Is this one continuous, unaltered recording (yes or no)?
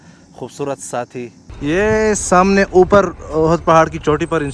no